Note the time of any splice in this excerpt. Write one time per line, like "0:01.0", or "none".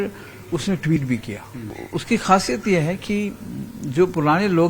0:01.8